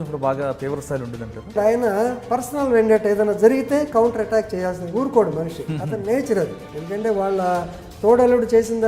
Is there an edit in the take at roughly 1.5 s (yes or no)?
yes